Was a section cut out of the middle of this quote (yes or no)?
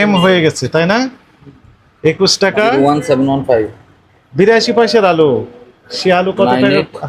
no